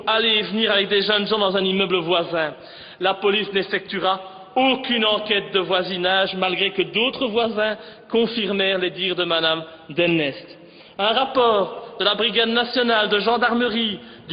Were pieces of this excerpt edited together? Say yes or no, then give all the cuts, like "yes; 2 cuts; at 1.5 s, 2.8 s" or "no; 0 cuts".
yes; 1 cut; at 6.9 s